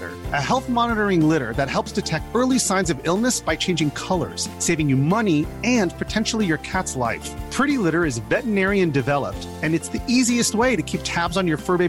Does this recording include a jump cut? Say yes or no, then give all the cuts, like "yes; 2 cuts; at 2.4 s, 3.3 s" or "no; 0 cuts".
no; 0 cuts